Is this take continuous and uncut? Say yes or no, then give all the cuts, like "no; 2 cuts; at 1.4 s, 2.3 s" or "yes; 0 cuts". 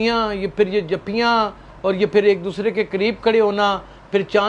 yes; 0 cuts